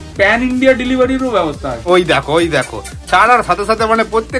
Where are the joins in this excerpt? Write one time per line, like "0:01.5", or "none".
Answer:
0:01.9